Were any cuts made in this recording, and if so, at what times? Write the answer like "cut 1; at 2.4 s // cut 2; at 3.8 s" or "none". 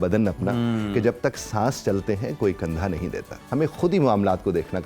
cut 1; at 3.3 s